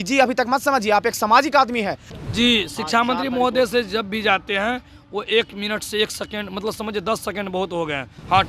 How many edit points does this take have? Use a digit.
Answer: 1